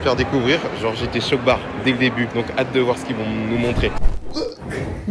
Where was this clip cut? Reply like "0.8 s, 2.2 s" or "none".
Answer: 4.0 s